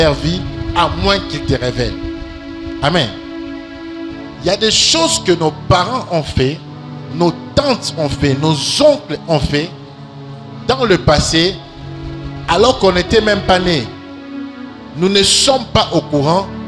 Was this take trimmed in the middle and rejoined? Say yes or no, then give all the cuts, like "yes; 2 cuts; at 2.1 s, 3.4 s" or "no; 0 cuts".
no; 0 cuts